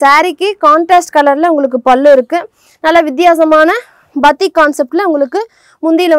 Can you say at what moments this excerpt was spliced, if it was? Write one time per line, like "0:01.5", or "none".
none